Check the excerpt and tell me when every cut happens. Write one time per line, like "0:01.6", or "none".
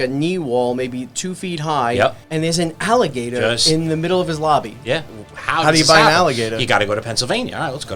0:02.2
0:05.1